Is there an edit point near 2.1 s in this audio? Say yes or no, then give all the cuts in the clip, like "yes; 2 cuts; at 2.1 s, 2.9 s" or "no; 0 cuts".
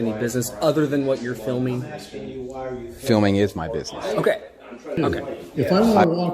no; 1 cut; at 5.0 s